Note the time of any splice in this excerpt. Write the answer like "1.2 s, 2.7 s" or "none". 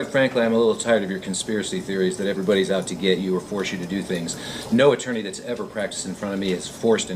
none